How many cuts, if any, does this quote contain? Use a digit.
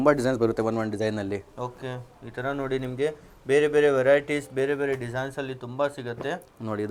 0